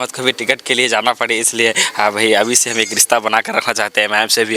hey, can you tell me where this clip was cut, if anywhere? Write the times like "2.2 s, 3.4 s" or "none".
none